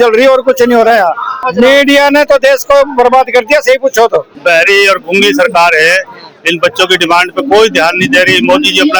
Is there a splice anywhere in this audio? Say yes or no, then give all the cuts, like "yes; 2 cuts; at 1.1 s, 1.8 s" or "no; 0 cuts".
yes; 2 cuts; at 1.5 s, 4.3 s